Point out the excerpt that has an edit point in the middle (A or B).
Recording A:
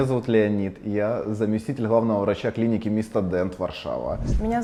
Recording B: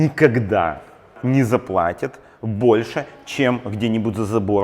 B